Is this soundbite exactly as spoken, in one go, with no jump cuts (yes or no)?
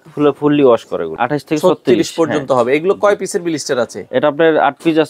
no